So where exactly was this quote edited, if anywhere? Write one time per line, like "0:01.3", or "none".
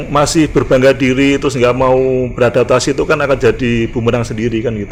none